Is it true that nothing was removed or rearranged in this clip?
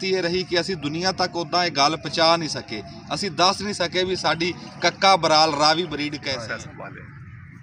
no; 1 cut; at 6.3 s

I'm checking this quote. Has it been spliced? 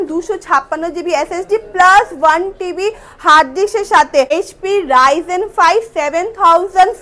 yes; 1 cut; at 4.3 s

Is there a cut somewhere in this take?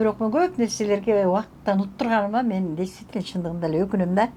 no; 0 cuts

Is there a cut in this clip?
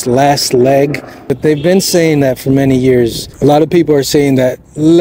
yes; 2 cuts; at 1.3 s, 3.2 s

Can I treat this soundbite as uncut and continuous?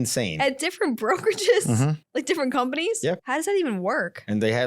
no; 2 cuts; at 2.0 s, 3.2 s

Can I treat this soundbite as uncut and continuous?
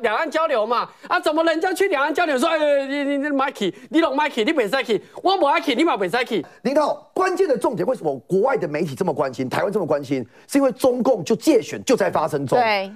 no; 1 cut; at 6.5 s

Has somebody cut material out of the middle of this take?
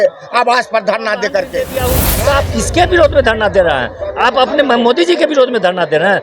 yes; 1 cut; at 1.6 s

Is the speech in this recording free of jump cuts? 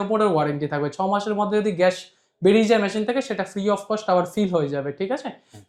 yes; 0 cuts

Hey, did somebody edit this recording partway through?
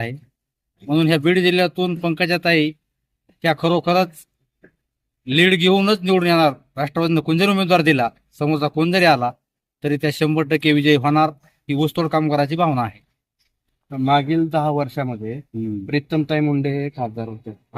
no; 0 cuts

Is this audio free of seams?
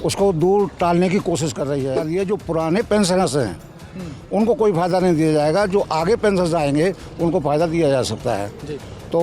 no; 1 cut; at 2.1 s

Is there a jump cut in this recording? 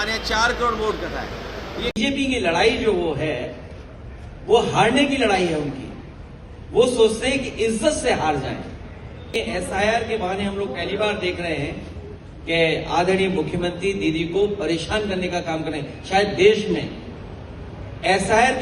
yes; 2 cuts; at 2.0 s, 9.4 s

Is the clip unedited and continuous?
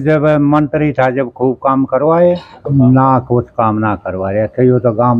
no; 1 cut; at 2.5 s

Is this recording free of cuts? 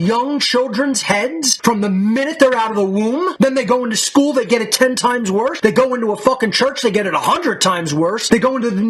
yes; 0 cuts

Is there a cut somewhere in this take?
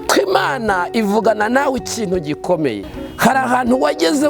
yes; 1 cut; at 3.0 s

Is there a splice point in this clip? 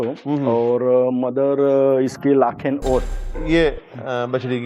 yes; 1 cut; at 3.3 s

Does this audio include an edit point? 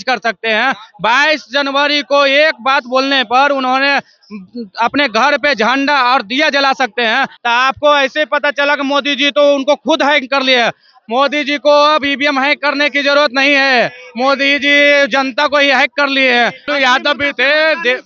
yes; 2 cuts; at 7.3 s, 16.6 s

